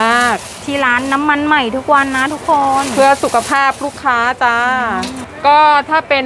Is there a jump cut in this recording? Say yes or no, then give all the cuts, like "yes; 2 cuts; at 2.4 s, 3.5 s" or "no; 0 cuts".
yes; 1 cut; at 5.2 s